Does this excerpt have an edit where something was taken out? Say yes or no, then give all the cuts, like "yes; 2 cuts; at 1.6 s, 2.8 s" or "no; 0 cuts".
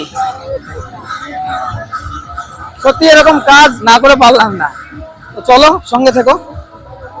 no; 0 cuts